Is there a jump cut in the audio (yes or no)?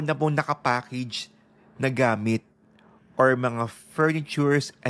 no